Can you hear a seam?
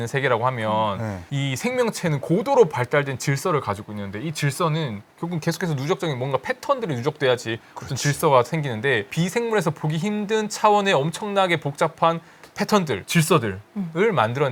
no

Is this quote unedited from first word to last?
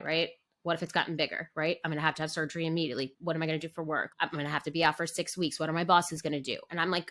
no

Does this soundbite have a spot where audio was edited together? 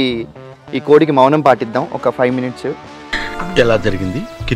no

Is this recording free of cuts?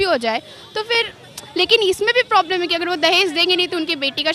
yes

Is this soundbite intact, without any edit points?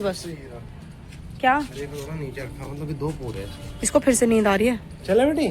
yes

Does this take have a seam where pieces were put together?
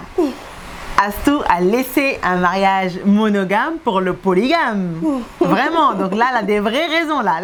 no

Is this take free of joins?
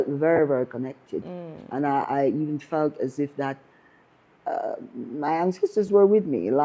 yes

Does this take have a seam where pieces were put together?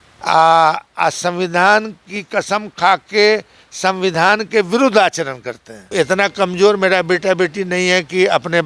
yes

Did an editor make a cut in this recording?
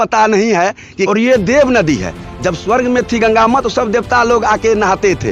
yes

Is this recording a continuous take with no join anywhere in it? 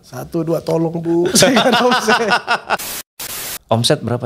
no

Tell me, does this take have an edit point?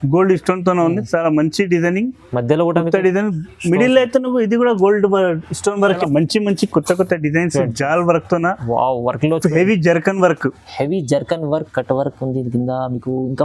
yes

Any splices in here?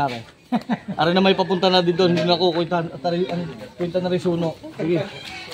no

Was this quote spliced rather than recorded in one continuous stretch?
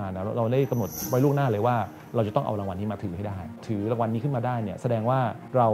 yes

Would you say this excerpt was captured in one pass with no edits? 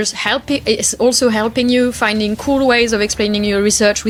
yes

